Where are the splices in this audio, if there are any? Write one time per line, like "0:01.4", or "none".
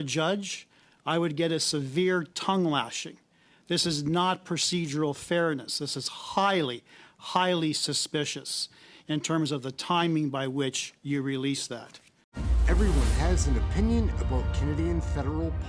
0:12.4